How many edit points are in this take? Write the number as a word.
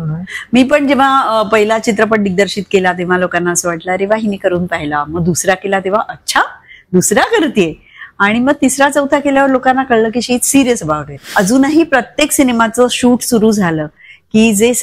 one